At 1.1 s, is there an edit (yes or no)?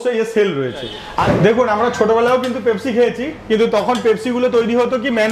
no